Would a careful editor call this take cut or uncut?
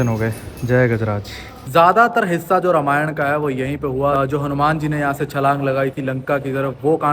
cut